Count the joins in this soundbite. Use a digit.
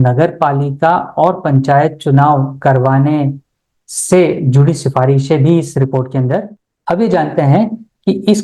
1